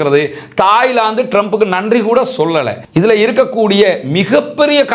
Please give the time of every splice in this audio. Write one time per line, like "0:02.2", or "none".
0:02.8